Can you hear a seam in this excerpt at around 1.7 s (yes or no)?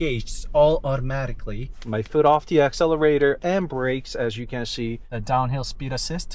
yes